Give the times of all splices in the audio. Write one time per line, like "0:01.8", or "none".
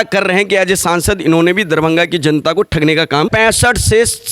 0:03.3